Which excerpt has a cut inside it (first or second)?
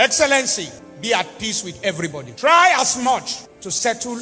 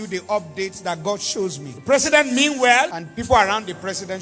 second